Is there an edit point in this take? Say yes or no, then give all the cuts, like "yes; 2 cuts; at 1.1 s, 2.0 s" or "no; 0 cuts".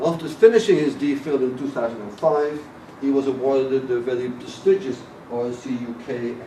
yes; 1 cut; at 4.5 s